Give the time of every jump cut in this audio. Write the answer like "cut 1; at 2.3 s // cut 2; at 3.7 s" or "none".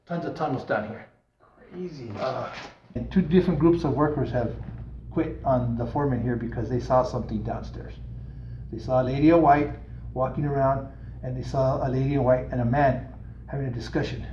cut 1; at 3.0 s